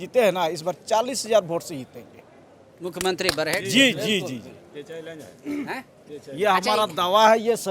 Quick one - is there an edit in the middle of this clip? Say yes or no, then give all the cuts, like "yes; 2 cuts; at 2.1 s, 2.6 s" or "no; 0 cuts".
no; 0 cuts